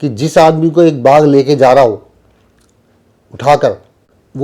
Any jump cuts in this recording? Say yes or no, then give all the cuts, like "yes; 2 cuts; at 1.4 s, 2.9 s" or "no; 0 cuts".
no; 0 cuts